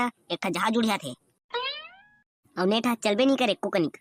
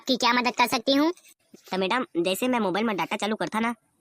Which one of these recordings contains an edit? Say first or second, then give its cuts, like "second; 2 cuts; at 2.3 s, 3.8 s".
second; 1 cut; at 1.3 s